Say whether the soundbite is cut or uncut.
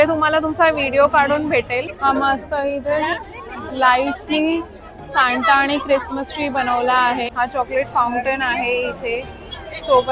cut